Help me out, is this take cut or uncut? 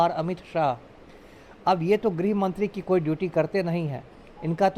uncut